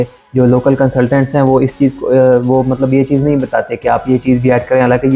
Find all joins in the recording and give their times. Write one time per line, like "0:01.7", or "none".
none